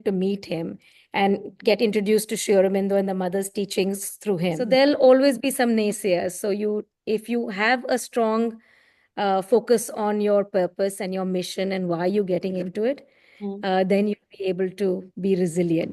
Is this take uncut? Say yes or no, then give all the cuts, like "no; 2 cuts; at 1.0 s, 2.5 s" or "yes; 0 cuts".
no; 1 cut; at 4.6 s